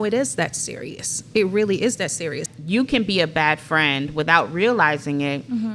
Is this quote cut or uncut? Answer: cut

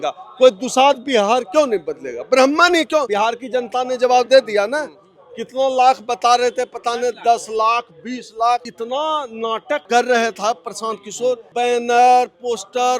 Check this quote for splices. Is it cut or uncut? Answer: cut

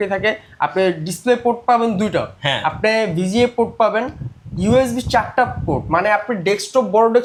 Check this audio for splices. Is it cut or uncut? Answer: uncut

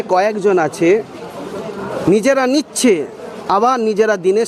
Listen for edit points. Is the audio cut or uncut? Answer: uncut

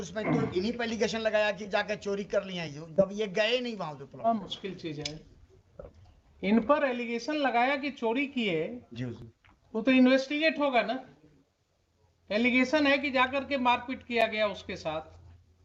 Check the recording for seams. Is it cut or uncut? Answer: uncut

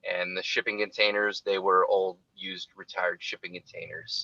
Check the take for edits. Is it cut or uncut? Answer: uncut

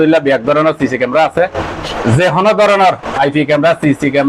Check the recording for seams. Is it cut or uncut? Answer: cut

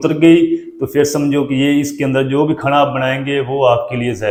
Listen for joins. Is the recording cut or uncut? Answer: uncut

